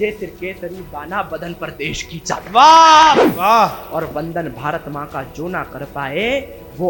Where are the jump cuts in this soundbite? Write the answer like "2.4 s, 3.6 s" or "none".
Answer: 3.2 s